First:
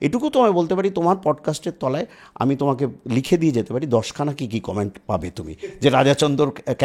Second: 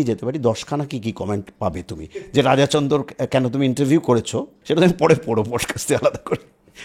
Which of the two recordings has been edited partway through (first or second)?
second